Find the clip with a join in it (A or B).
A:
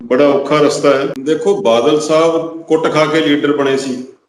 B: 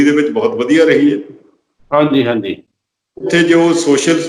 A